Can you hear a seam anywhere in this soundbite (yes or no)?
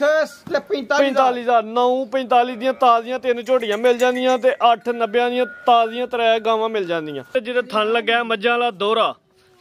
yes